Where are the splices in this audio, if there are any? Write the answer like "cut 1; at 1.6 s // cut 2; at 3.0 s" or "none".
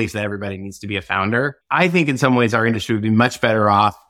cut 1; at 1.7 s